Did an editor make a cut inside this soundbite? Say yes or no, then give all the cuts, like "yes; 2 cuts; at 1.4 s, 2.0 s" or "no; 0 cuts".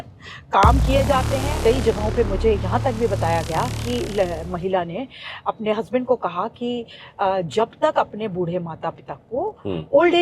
yes; 1 cut; at 1.4 s